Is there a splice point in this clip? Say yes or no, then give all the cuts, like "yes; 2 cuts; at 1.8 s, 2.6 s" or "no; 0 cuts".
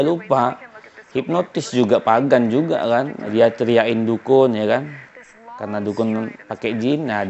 yes; 1 cut; at 3.2 s